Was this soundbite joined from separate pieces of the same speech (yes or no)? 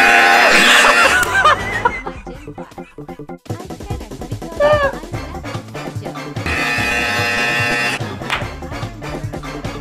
no